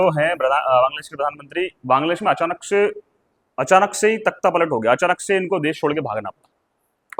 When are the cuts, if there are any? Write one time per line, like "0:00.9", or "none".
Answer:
none